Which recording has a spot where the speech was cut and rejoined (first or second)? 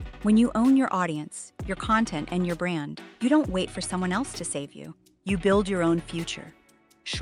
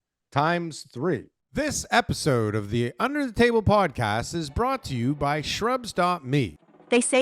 second